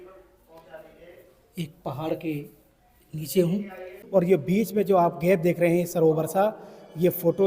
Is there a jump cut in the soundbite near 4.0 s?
yes; 1 cut; at 4.0 s

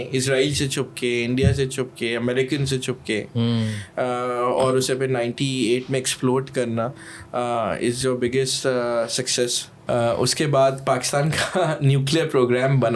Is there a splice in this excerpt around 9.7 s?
yes; 1 cut; at 9.7 s

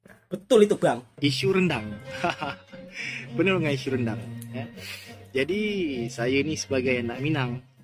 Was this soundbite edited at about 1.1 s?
yes; 1 cut; at 1.1 s

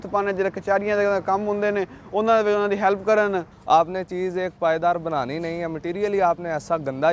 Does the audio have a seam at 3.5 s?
yes; 1 cut; at 3.5 s

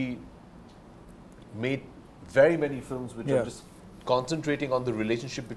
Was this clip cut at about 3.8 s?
no; 0 cuts

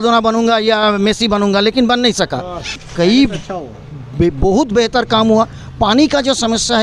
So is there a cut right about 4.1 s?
no; 1 cut; at 2.8 s

